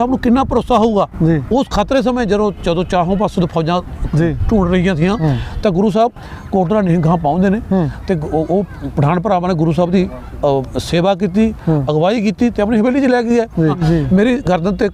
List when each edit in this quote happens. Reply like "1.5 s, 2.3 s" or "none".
13.8 s